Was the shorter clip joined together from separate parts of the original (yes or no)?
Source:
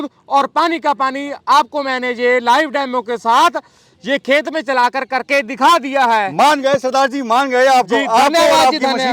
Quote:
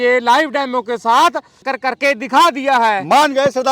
yes